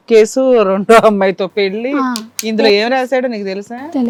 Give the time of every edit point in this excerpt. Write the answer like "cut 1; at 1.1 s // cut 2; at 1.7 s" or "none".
none